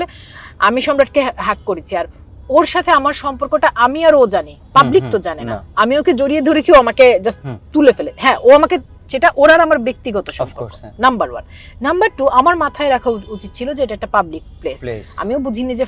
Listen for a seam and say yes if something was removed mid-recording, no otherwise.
no